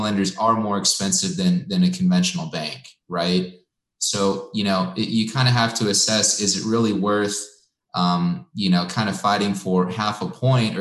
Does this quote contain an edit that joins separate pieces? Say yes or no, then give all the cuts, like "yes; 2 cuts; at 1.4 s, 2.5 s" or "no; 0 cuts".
no; 0 cuts